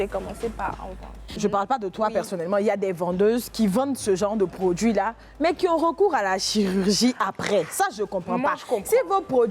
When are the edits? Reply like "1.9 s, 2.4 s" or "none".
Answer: 1.3 s